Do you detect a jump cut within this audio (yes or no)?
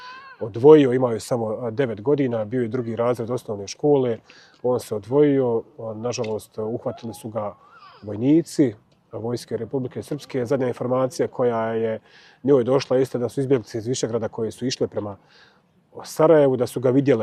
no